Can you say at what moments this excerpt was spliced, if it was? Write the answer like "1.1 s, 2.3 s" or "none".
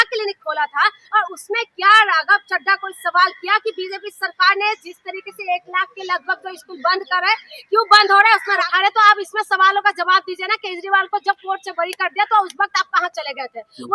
8.6 s

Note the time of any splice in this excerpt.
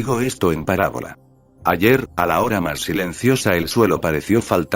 3.2 s

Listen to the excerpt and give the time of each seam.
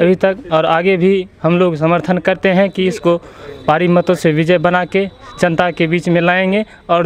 none

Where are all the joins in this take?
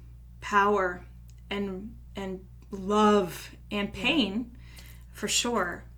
none

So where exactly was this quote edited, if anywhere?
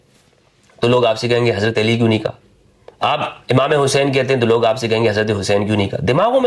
none

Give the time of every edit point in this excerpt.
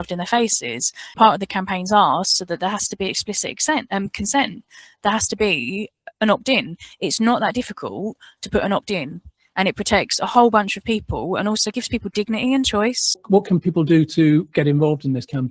1.1 s, 13.2 s

